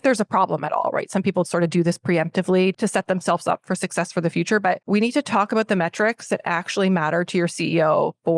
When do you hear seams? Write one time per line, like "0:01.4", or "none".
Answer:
0:02.7
0:04.8